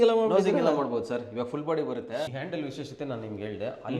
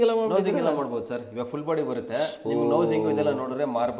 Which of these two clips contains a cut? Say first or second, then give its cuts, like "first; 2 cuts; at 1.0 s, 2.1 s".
first; 1 cut; at 2.3 s